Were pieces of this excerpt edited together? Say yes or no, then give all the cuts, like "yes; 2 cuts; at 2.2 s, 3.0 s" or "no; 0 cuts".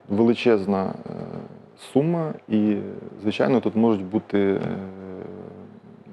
no; 0 cuts